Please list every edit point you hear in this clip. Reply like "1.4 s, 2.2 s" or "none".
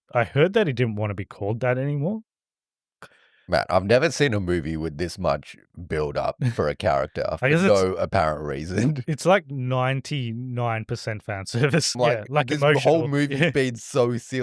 2.9 s, 12.0 s